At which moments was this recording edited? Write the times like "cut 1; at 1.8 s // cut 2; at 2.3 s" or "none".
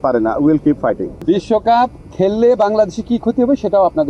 cut 1; at 1.1 s